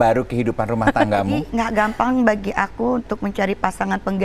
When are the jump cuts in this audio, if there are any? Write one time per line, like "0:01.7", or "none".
0:01.5